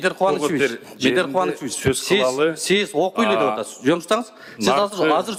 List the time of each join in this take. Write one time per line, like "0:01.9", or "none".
none

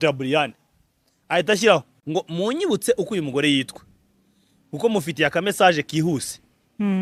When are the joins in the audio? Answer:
0:02.0

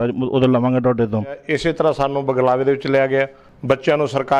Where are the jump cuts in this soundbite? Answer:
0:01.4
0:03.5

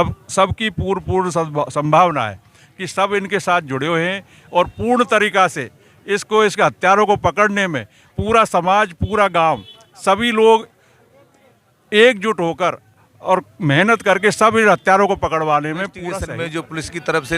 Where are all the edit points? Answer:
0:16.2

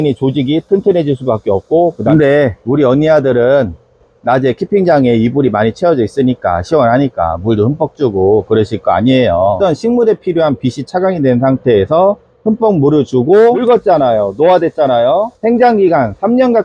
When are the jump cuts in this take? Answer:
0:02.0
0:09.6
0:13.6
0:15.3

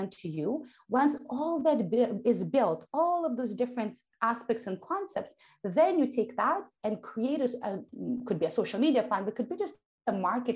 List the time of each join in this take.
0:07.9

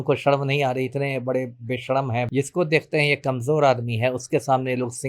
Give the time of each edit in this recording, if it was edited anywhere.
0:02.3

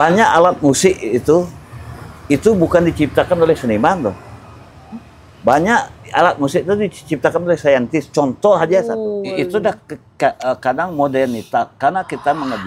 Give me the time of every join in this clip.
0:09.0

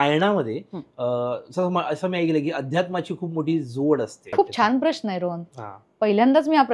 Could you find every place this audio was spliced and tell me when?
0:04.3

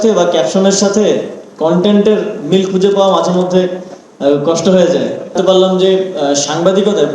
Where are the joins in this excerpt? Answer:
0:05.3

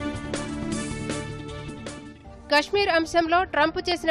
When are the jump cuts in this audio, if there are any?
none

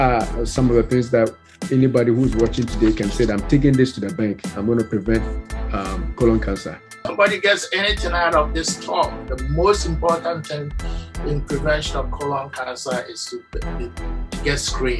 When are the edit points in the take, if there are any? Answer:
0:06.9

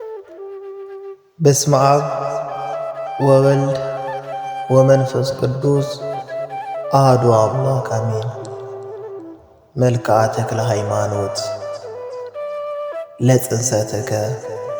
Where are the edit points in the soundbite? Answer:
0:00.9
0:08.4
0:09.8

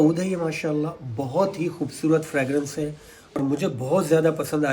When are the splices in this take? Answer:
0:03.4

